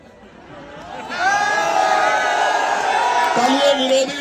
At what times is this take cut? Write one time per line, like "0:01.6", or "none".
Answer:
none